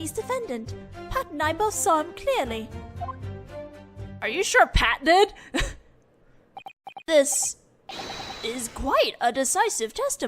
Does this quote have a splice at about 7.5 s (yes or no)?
no